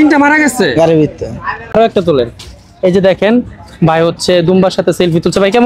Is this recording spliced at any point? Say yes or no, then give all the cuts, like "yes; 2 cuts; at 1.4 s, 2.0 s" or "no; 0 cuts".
yes; 1 cut; at 1.7 s